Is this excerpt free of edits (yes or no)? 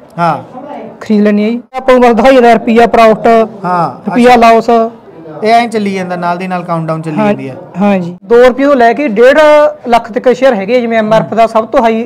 no